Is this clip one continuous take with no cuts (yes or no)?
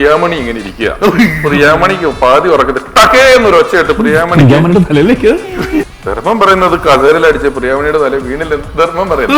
no